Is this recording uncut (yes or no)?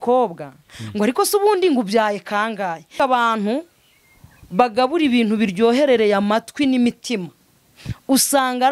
no